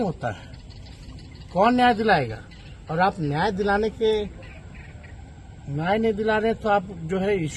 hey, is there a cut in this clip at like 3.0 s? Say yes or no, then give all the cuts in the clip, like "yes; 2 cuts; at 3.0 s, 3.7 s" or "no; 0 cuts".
no; 0 cuts